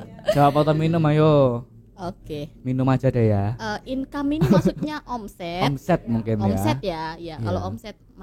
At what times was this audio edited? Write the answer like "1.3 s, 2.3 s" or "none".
none

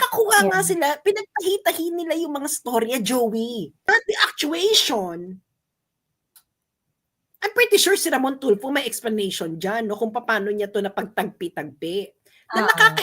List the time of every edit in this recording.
3.9 s

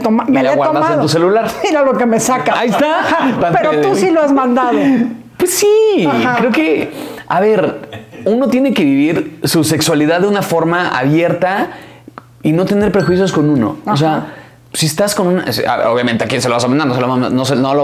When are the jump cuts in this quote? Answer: 3.4 s

